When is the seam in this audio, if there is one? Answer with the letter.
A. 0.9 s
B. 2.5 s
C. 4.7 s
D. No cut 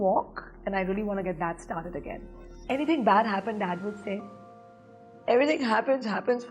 B